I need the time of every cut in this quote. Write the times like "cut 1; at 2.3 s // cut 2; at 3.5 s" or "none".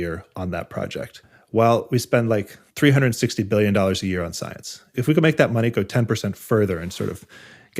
cut 1; at 1.3 s // cut 2; at 2.6 s